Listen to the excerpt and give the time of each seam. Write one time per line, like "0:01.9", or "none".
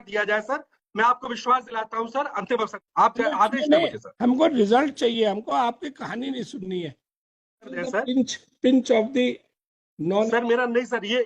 0:02.8
0:07.7